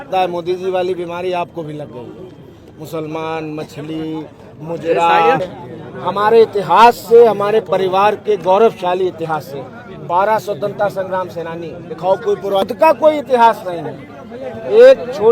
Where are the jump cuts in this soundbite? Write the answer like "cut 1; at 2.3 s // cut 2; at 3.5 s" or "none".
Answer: cut 1; at 5.4 s // cut 2; at 12.7 s